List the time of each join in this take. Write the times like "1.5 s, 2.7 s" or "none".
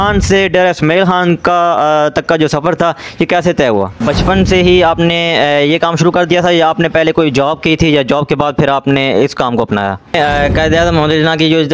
4.0 s, 10.4 s